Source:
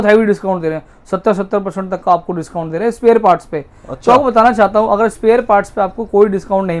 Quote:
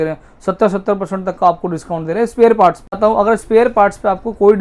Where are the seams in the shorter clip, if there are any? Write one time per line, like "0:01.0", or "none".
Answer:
0:03.0

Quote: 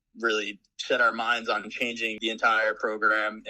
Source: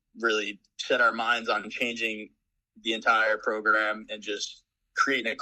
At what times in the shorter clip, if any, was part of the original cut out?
0:02.2

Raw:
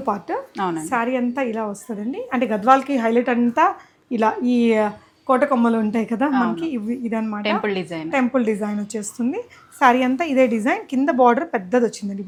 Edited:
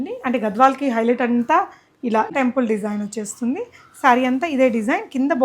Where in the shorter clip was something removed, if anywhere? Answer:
0:02.3

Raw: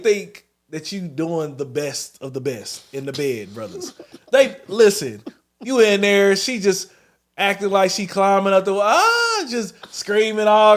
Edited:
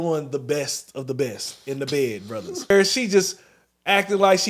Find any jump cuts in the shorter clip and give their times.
0:02.7

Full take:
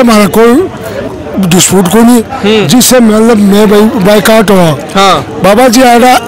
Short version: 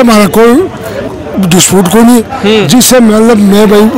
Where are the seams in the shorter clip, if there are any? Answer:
none

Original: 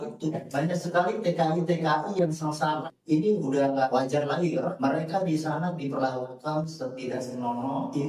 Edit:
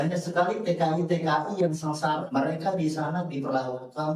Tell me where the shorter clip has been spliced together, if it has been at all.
0:02.2

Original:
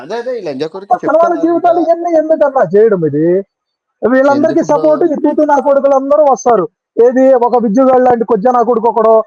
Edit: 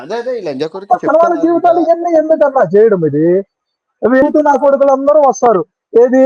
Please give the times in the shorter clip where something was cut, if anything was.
0:04.2

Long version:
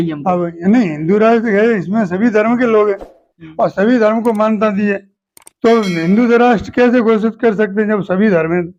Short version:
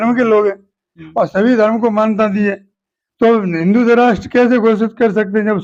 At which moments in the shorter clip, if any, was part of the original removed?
none

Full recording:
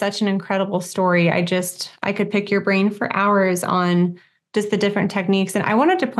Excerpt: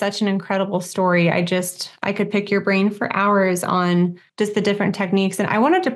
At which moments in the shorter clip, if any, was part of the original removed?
0:04.2

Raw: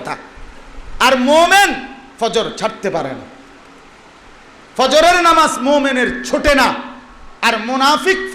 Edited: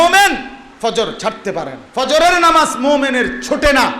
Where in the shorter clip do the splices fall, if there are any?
0:01.8

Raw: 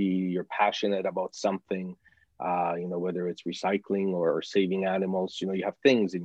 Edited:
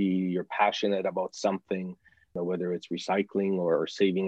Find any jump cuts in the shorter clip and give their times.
0:02.3

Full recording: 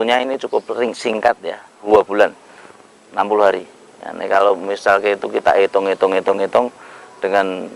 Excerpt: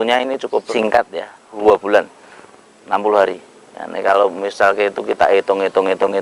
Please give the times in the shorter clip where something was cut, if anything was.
0:01.1

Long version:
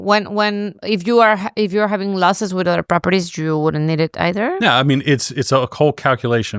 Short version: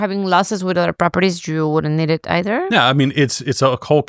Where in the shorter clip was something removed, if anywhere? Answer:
none

